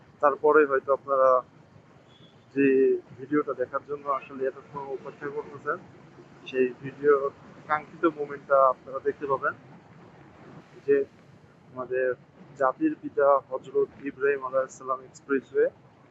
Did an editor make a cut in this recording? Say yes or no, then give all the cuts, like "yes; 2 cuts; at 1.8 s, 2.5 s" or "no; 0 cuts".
yes; 1 cut; at 10.6 s